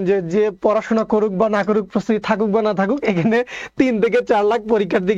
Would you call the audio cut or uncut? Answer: uncut